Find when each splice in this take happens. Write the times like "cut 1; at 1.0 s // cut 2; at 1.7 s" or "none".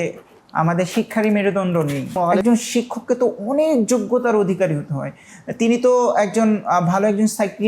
cut 1; at 2.1 s